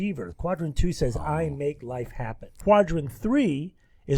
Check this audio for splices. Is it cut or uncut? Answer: cut